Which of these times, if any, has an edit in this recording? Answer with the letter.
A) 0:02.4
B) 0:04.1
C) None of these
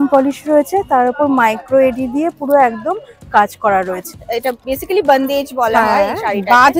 B